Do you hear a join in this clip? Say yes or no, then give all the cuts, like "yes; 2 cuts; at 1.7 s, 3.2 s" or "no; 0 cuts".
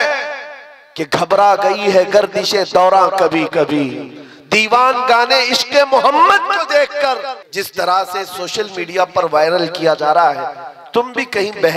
yes; 1 cut; at 7.3 s